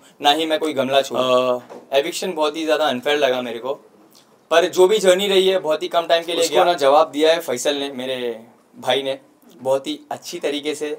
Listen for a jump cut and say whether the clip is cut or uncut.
cut